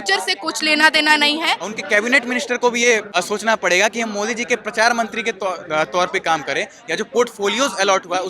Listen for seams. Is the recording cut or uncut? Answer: cut